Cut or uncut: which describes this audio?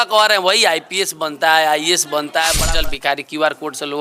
cut